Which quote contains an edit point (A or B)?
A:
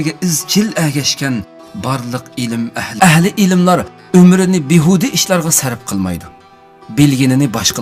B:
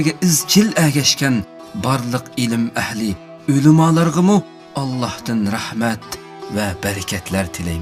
B